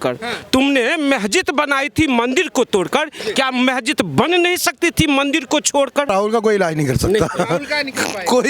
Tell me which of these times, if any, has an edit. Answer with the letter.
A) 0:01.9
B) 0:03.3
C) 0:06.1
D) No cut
C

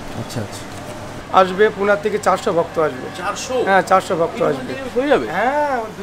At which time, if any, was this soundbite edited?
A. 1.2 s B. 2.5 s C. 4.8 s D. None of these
A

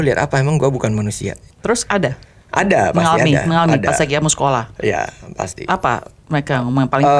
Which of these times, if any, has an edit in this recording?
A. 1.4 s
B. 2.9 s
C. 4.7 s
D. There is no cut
D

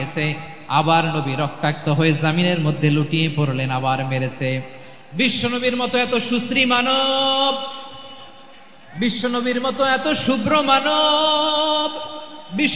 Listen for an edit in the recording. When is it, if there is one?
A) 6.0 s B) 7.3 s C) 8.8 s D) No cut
D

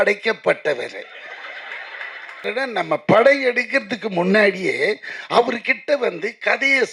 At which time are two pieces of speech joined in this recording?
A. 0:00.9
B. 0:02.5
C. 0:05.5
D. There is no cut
B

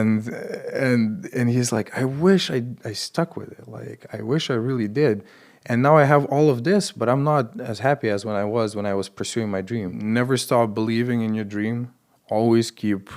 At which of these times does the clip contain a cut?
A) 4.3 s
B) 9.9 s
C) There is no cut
B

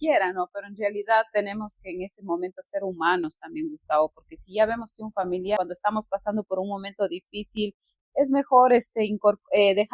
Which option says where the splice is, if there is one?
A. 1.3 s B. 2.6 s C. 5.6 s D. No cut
C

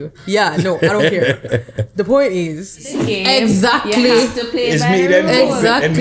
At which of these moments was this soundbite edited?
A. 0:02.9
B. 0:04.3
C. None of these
A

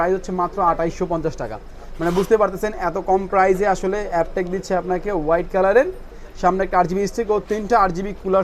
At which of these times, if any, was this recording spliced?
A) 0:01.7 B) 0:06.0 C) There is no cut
C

